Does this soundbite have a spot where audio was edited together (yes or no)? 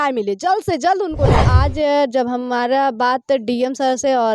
yes